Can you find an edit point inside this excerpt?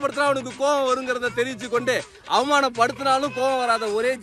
no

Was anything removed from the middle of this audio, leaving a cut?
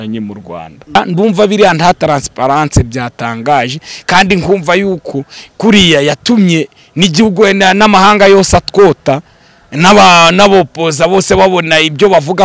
yes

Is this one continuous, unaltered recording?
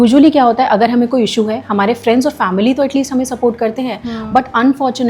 yes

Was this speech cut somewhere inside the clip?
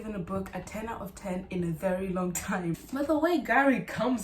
yes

